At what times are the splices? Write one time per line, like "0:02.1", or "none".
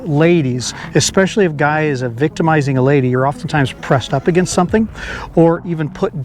none